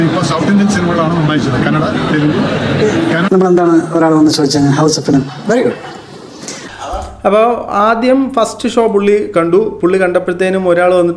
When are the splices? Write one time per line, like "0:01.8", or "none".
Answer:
0:03.3